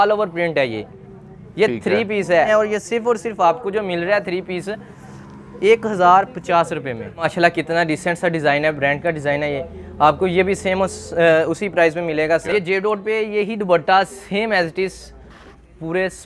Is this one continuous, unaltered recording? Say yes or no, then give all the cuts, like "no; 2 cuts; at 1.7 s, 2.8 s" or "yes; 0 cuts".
no; 3 cuts; at 2.5 s, 7.2 s, 12.5 s